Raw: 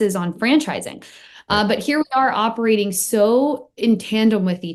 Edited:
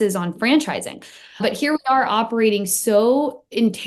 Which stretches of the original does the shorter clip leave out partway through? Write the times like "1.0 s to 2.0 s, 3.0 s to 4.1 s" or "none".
1.4 s to 1.7 s